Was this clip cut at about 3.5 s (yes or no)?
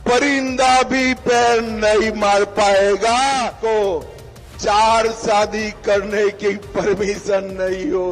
yes